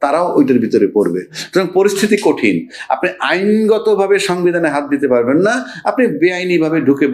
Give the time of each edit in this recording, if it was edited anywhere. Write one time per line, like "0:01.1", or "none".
none